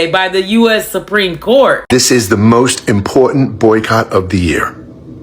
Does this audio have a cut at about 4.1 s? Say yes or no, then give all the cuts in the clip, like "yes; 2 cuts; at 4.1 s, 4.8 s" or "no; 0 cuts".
no; 1 cut; at 1.8 s